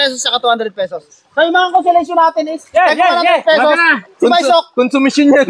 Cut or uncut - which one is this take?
uncut